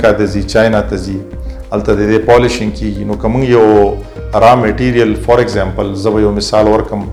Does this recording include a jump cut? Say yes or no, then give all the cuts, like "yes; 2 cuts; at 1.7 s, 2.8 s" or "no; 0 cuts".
no; 0 cuts